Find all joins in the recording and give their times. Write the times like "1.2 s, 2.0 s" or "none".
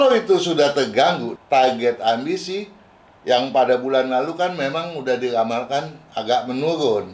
1.3 s